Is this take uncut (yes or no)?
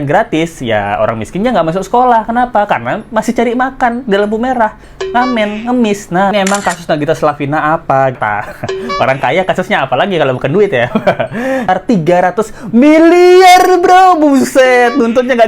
no